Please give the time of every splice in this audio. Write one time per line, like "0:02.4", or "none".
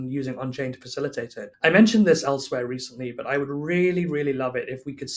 0:01.4